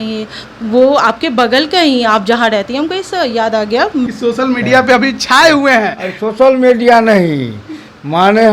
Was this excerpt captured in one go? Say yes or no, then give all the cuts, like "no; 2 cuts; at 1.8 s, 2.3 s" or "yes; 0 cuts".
no; 1 cut; at 4.1 s